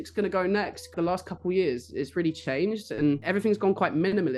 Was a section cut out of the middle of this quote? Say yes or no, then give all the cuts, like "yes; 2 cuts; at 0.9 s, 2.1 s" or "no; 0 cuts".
yes; 2 cuts; at 0.9 s, 3.2 s